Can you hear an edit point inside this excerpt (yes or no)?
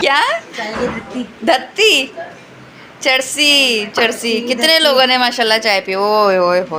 no